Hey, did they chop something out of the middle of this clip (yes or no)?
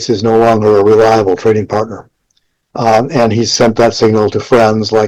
no